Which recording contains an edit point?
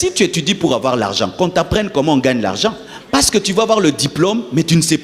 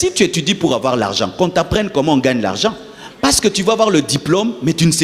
first; 1 cut; at 2.9 s

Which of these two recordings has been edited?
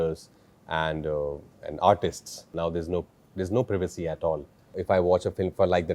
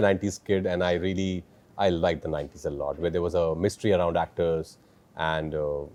first; 2 cuts; at 2.5 s, 4.7 s

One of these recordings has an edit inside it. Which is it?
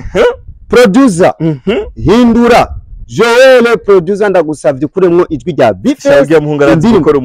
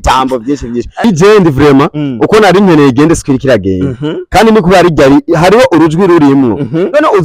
second; 1 cut; at 1.0 s

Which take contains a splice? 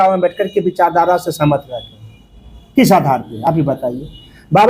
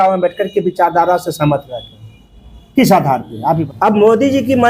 second; 1 cut; at 3.3 s

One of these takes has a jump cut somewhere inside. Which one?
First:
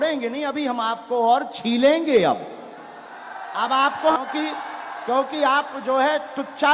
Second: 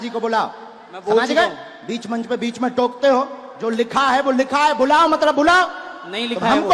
first; 1 cut; at 4.2 s

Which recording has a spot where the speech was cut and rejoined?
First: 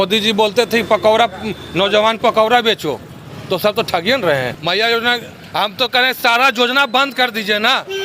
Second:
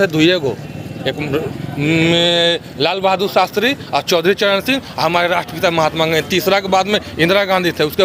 first; 1 cut; at 4.5 s

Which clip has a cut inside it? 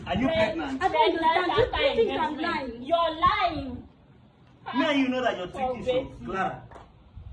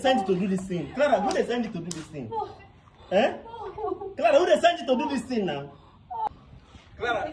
second; 1 cut; at 6.3 s

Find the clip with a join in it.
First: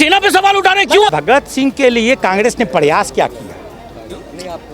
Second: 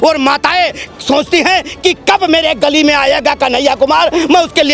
first; 1 cut; at 1.2 s

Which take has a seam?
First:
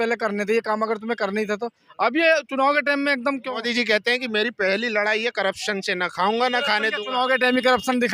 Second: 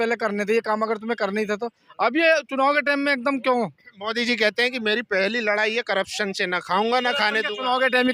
first; 1 cut; at 3.4 s

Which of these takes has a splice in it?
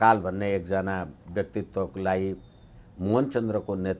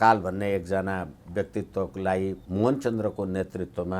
second; 1 cut; at 2.4 s

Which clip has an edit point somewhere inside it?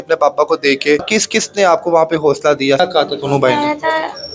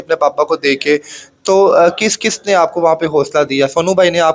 first; 2 cuts; at 1.2 s, 2.8 s

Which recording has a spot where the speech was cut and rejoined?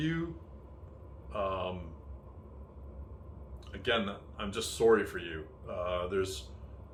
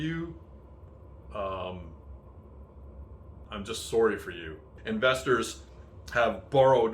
second; 2 cuts; at 3.4 s, 4.8 s

